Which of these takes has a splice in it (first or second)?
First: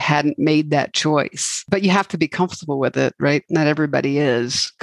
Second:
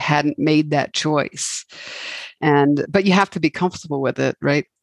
first